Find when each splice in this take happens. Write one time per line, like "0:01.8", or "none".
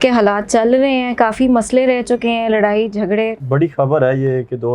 0:03.4